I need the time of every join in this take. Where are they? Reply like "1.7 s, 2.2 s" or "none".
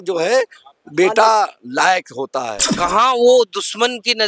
2.6 s